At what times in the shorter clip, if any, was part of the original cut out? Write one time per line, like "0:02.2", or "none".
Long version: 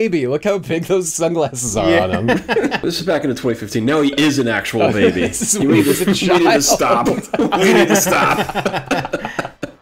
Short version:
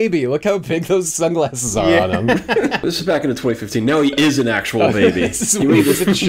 none

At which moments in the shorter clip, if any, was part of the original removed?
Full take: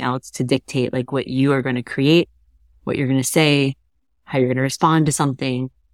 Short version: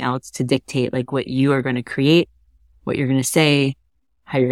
none

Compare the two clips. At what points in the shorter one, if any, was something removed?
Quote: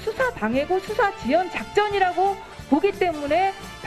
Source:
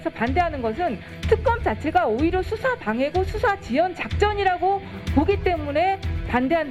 none

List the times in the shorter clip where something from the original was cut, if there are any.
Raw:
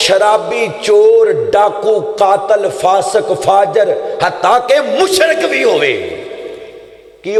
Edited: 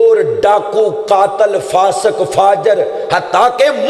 none

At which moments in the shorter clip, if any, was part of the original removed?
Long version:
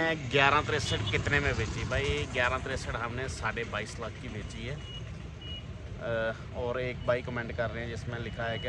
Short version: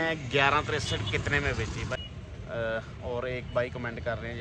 0:02.0

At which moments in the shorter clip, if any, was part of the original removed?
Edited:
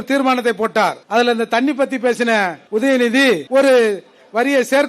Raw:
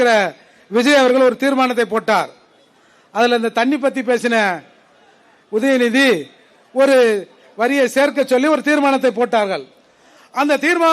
0:01.0
0:02.6
0:03.4

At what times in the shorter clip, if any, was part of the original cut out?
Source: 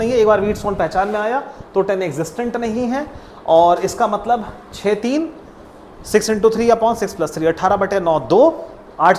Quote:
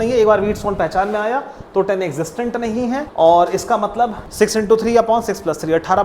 0:03.1
0:04.2

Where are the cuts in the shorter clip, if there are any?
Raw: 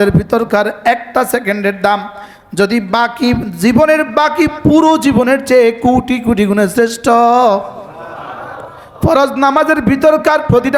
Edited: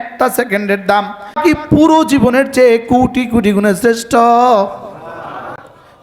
0:01.4

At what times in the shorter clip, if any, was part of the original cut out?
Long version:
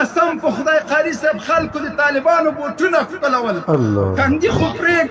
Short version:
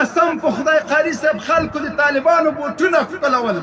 none

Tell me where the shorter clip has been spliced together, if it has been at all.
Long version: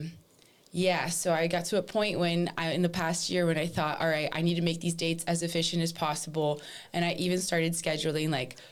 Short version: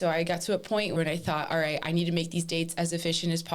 0:01.0

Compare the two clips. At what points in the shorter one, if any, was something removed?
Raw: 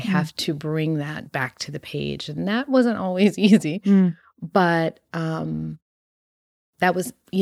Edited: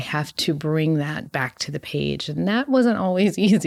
none

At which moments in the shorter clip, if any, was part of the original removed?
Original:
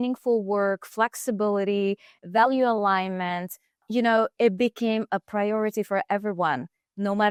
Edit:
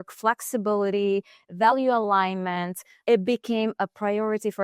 0:03.0

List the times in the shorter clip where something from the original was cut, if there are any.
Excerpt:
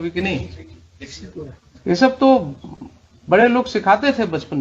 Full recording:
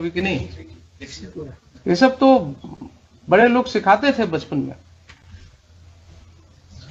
none

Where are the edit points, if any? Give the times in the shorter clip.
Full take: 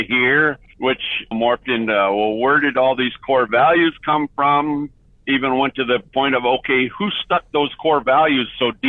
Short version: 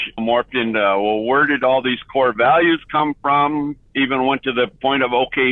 0:03.8

